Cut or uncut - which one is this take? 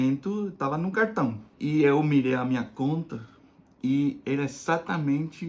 cut